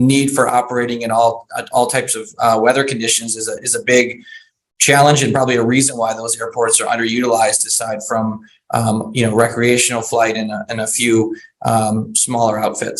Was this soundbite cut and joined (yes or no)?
no